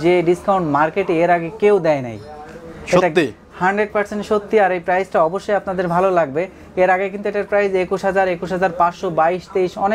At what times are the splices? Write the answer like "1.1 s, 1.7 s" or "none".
none